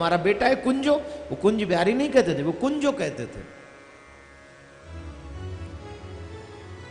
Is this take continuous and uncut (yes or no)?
yes